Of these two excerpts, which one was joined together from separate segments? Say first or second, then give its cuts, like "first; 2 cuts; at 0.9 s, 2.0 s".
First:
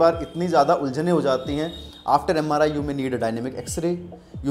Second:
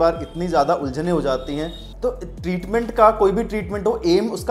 second; 1 cut; at 1.8 s